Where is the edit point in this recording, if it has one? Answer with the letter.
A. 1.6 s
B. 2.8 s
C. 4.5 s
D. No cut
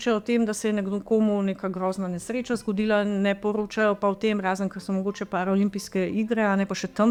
D